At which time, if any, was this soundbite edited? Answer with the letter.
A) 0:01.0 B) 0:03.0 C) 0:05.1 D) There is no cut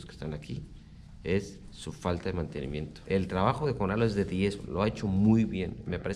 B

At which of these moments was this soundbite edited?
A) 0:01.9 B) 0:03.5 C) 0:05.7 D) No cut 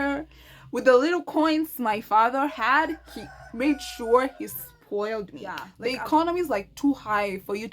C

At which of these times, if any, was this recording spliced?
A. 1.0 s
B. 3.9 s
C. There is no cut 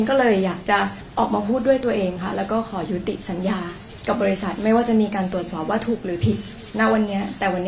A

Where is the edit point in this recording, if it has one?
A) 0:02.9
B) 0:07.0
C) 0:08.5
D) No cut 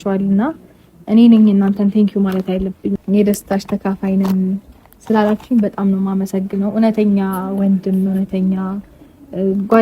A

